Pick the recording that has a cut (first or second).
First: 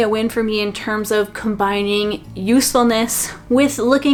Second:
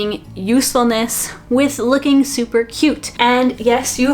second